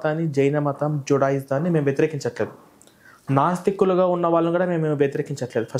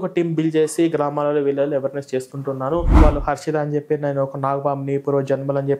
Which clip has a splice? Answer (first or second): second